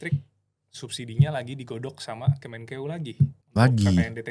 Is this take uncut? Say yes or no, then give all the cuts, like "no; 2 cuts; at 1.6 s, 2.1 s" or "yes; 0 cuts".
no; 1 cut; at 3.4 s